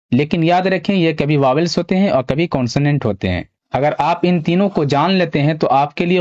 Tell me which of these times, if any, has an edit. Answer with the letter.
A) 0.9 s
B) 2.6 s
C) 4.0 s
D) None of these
C